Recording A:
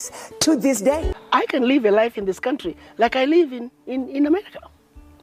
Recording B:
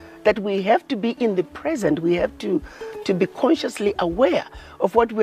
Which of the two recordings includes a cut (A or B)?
A